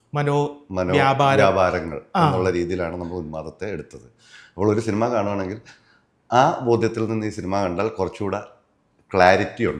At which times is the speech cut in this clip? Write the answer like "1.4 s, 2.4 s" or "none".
none